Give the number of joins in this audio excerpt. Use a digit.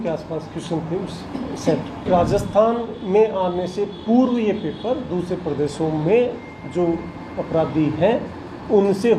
1